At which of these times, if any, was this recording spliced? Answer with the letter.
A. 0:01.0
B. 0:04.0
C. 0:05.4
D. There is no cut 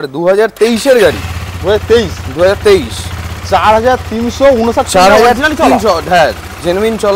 D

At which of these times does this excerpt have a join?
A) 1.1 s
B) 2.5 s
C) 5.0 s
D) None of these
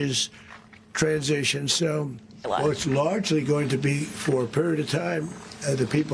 B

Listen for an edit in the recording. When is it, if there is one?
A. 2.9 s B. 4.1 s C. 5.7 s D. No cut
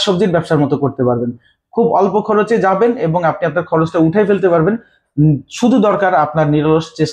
D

